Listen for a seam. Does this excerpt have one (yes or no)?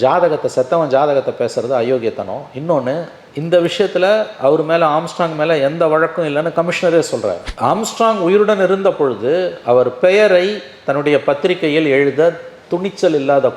yes